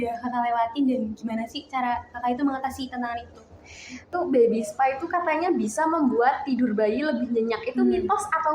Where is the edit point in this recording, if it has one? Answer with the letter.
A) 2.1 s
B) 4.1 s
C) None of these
B